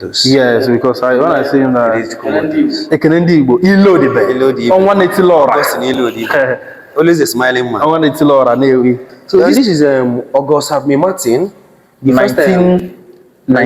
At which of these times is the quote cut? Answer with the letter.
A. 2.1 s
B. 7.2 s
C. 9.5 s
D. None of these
C